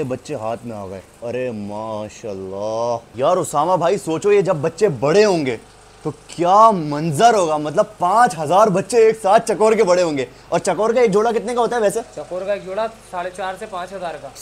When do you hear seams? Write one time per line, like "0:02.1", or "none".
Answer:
none